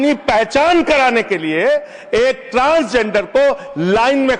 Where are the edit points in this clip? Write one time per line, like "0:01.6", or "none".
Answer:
none